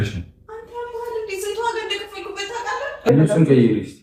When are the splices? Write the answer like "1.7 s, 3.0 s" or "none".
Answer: 3.1 s